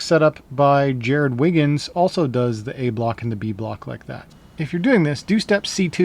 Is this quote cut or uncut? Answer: cut